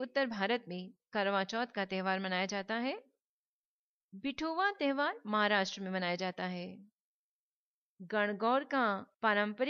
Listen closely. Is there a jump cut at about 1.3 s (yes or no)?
yes